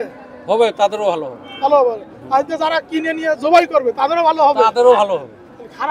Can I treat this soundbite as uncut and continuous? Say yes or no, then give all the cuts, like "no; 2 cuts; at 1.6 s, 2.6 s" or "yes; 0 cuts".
yes; 0 cuts